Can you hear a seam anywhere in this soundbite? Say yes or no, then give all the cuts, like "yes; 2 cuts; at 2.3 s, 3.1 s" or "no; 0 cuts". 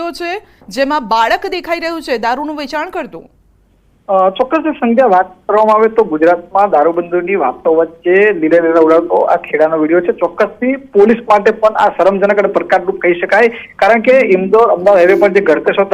yes; 1 cut; at 6.6 s